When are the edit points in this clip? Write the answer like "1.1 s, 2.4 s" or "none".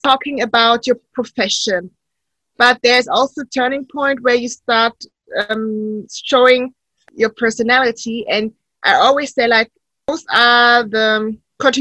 7.0 s, 10.1 s